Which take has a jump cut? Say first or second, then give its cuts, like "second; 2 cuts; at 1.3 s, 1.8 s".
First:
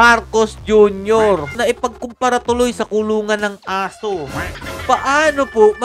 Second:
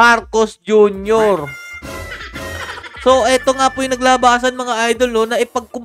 first; 2 cuts; at 1.6 s, 4.6 s